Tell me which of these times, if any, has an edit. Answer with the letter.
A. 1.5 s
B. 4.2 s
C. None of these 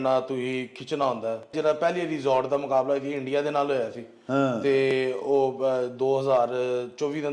A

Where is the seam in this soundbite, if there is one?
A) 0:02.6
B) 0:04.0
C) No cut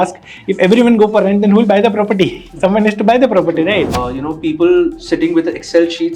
B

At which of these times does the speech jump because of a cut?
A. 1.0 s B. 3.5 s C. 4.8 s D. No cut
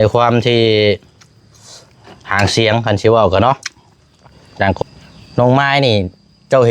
C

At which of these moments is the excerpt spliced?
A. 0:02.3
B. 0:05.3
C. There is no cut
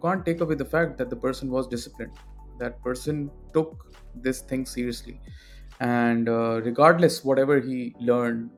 C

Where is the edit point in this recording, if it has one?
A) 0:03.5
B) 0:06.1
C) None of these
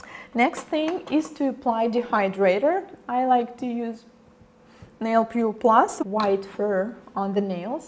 C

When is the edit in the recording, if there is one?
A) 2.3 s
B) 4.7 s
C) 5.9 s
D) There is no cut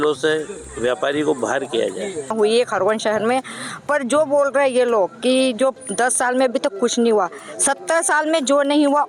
A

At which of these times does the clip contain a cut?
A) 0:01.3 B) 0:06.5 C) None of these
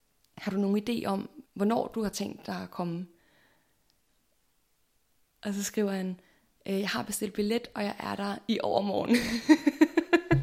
A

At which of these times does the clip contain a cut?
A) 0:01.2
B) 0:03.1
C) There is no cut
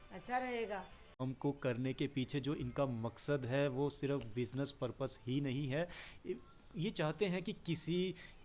A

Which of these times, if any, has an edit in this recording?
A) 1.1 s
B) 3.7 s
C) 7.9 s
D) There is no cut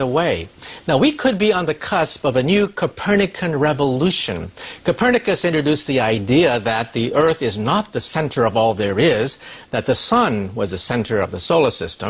D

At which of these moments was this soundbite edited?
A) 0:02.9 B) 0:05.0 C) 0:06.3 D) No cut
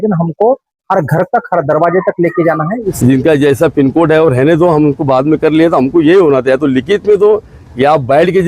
A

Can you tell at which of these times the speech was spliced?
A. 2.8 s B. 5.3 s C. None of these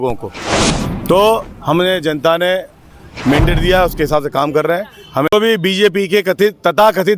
B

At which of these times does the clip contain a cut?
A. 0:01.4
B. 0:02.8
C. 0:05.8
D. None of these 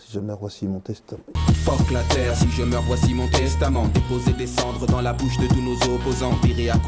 D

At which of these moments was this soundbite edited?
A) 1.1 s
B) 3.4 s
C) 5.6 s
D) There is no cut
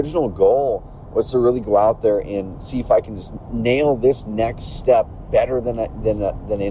D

